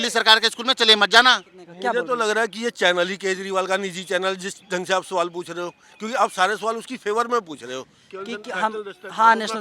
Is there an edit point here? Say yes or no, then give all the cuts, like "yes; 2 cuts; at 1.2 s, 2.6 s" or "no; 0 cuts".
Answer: yes; 2 cuts; at 1.6 s, 8.0 s